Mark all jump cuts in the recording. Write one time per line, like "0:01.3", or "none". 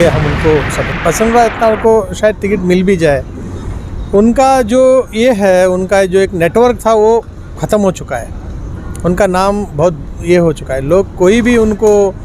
0:01.0